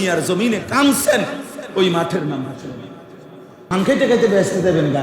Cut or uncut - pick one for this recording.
cut